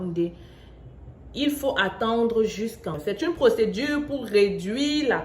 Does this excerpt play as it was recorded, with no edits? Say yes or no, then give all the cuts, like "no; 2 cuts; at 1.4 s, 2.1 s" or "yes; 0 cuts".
no; 1 cut; at 3.0 s